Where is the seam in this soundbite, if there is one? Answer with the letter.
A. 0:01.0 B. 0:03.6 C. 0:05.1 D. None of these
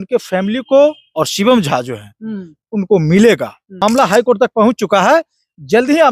B